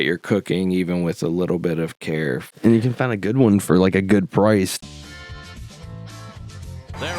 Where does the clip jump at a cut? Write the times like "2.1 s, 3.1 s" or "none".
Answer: 2.5 s, 4.7 s